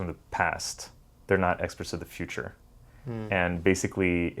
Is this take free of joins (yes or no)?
yes